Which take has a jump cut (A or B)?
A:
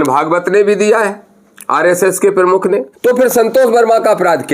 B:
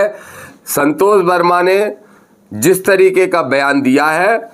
A